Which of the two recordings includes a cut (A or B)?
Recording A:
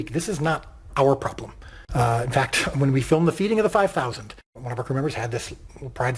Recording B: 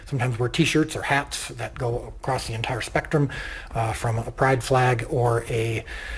A